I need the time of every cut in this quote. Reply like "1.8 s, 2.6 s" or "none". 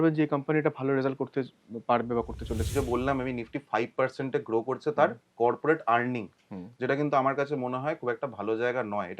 2.7 s

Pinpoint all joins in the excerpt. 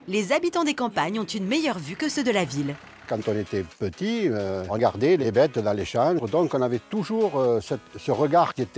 3.0 s, 4.8 s, 6.2 s

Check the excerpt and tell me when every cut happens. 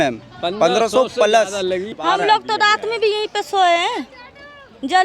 1.9 s

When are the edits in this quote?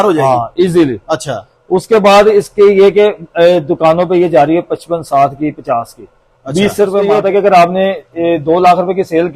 7.0 s

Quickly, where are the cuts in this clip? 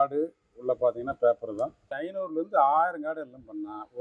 2.0 s

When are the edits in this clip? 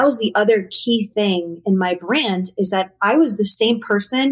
none

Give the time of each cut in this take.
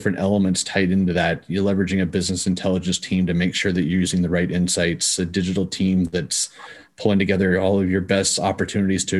none

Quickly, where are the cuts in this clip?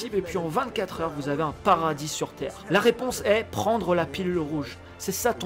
2.5 s

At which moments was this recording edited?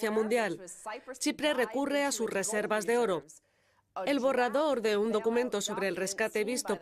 2.4 s

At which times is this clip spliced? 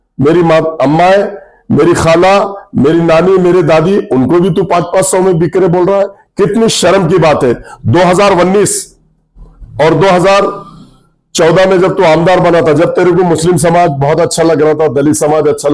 none

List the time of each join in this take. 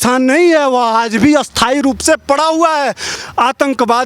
3.1 s

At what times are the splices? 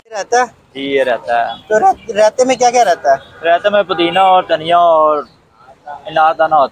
none

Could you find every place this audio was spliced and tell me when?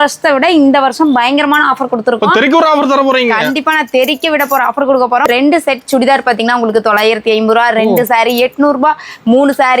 5.2 s

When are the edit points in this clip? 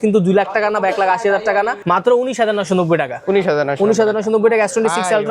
1.8 s

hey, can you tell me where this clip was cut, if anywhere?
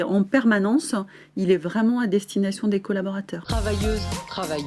3.4 s

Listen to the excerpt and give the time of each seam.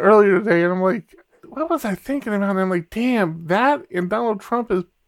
1.5 s

